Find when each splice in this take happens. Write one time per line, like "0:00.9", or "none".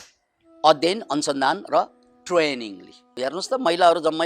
0:03.1